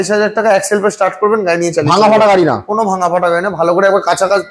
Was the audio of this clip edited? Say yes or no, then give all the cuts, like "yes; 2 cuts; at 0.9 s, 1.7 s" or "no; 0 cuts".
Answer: no; 0 cuts